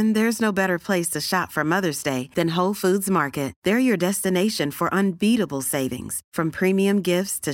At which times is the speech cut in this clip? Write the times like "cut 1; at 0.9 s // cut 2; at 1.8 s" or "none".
none

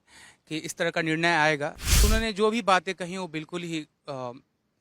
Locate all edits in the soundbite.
cut 1; at 2.0 s

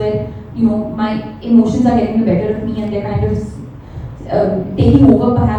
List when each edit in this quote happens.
none

